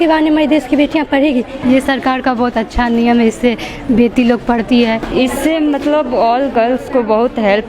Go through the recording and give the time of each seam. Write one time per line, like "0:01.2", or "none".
0:01.5
0:05.0